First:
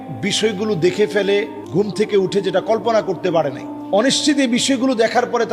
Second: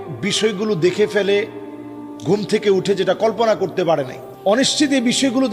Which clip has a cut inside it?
first; 1 cut; at 1.6 s

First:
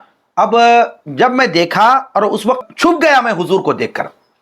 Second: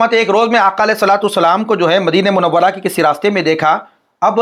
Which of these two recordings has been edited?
first; 1 cut; at 2.6 s

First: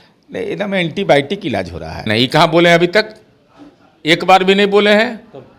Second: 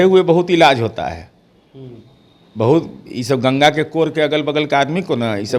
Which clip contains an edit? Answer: first; 1 cut; at 2.0 s

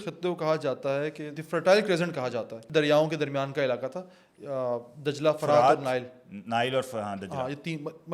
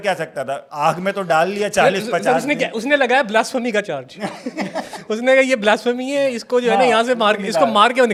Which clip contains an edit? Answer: first; 2 cuts; at 1.3 s, 2.6 s

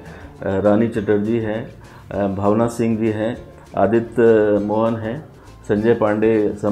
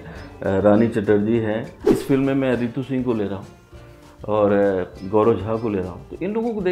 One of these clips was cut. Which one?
second; 1 cut; at 1.9 s

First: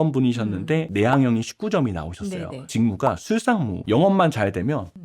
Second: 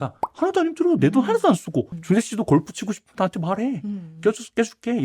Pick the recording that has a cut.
first; 3 cuts; at 0.9 s, 2.7 s, 3.8 s

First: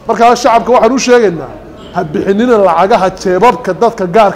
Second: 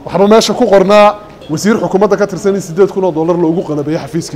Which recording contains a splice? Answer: second; 1 cut; at 1.3 s

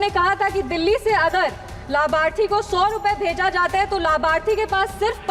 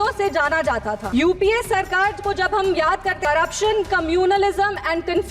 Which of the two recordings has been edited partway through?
second; 2 cuts; at 1.0 s, 3.2 s

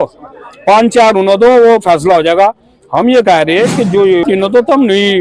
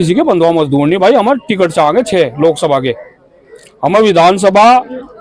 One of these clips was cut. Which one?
first; 1 cut; at 4.2 s

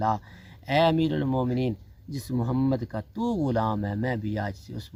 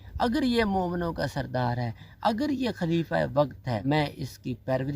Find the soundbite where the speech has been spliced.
second; 1 cut; at 3.8 s

